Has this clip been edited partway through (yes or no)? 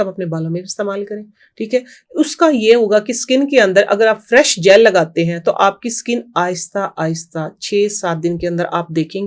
no